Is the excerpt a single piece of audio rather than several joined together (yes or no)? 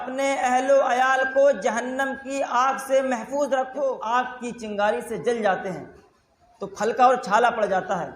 no